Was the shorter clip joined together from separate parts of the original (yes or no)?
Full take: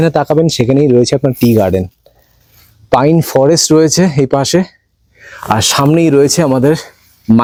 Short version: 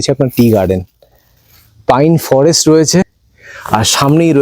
yes